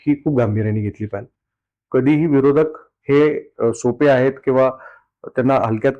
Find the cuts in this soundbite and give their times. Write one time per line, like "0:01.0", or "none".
none